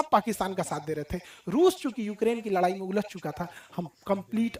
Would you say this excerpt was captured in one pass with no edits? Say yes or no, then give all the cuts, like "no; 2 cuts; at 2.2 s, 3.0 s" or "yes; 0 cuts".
yes; 0 cuts